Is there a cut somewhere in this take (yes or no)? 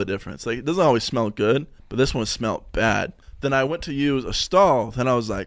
yes